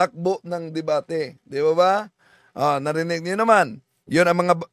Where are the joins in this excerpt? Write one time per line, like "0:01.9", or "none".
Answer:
none